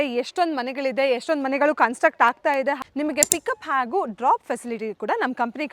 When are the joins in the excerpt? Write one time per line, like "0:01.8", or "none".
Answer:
0:02.8